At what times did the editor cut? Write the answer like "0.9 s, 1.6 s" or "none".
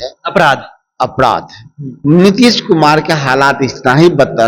1.9 s